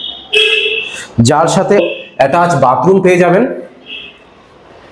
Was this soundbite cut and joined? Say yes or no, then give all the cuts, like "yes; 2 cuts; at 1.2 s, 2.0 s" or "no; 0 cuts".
yes; 1 cut; at 1.8 s